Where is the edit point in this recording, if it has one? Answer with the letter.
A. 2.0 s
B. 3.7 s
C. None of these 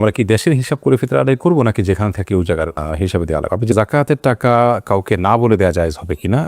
B